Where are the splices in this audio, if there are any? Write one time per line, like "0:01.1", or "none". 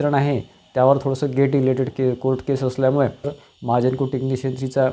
0:03.4

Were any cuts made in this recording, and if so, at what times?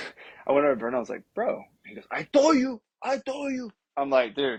none

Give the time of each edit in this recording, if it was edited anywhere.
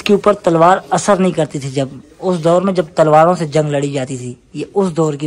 none

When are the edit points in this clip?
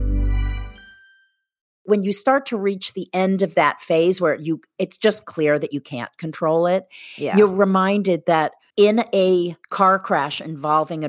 0:01.8
0:08.6
0:09.6

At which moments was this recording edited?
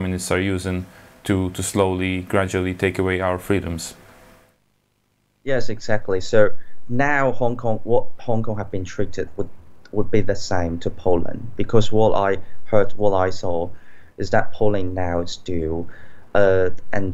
none

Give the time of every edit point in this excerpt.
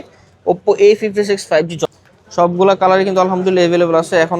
0:01.8

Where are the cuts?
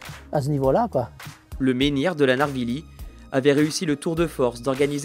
0:01.4

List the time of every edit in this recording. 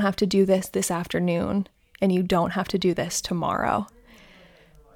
none

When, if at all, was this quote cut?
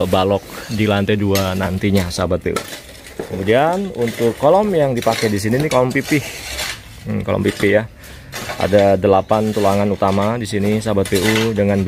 none

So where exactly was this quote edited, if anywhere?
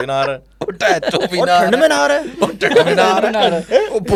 none

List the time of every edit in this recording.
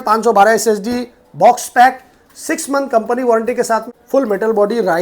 0:03.9

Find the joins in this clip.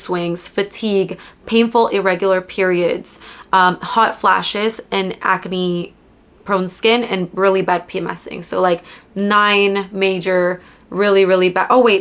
none

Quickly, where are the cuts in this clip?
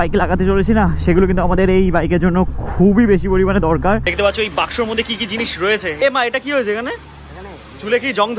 0:04.0
0:06.0

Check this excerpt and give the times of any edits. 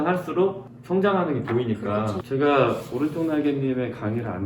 0:02.2

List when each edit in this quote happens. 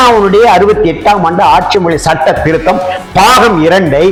none

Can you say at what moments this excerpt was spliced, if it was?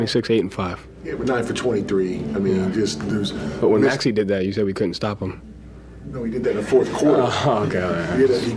0:06.4

